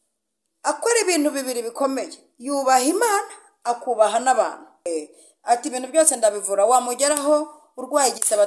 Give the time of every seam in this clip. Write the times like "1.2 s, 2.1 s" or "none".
4.9 s